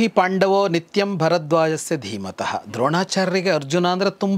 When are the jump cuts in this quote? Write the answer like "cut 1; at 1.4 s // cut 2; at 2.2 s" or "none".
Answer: none